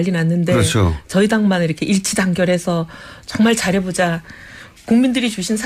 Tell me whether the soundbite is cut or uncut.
cut